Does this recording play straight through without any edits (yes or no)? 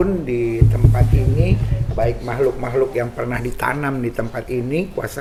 yes